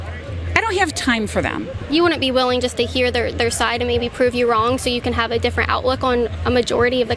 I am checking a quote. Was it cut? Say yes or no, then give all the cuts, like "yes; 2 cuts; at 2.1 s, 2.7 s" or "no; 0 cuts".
no; 0 cuts